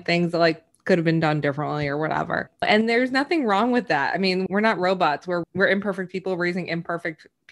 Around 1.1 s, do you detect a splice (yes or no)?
no